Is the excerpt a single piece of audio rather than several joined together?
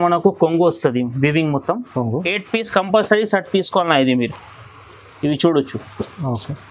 no; 1 cut; at 2.3 s

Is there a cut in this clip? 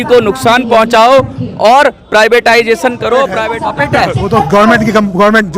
yes; 1 cut; at 3.4 s

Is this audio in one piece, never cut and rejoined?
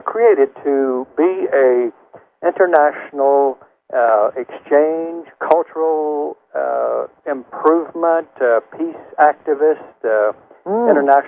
yes; 0 cuts

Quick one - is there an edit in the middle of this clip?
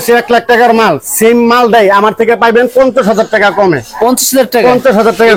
no; 0 cuts

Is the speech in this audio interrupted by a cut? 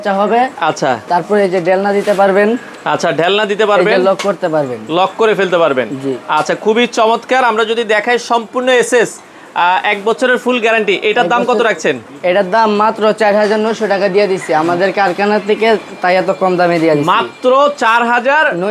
no; 0 cuts

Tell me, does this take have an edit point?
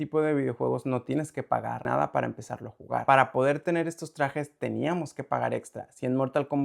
yes; 2 cuts; at 1.9 s, 3.0 s

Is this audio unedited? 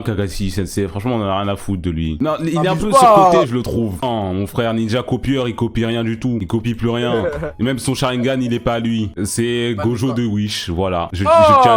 no; 1 cut; at 4.0 s

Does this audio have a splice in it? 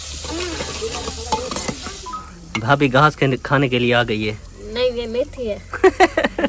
no; 0 cuts

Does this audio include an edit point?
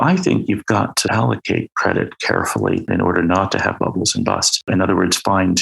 yes; 3 cuts; at 1.1 s, 2.9 s, 4.7 s

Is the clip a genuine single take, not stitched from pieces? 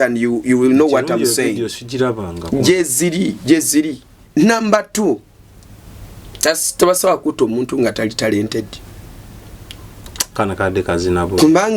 no; 1 cut; at 4.1 s

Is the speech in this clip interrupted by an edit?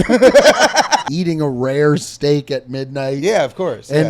yes; 1 cut; at 1.0 s

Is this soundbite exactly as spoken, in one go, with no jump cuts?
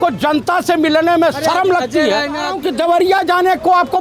no; 1 cut; at 2.6 s

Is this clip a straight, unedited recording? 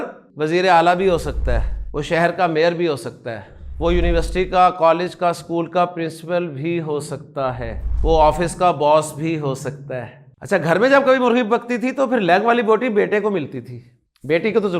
no; 1 cut; at 10.2 s

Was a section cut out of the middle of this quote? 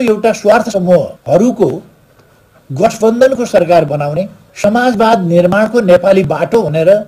yes; 2 cuts; at 1.2 s, 4.4 s

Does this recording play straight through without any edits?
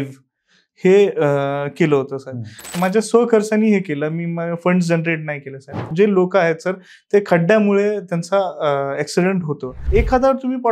no; 3 cuts; at 2.7 s, 5.9 s, 9.8 s

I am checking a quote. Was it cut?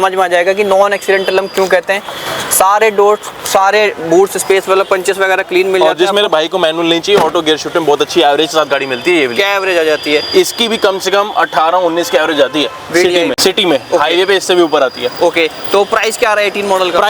no; 0 cuts

